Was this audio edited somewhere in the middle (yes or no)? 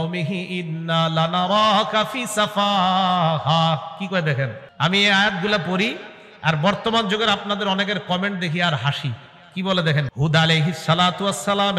yes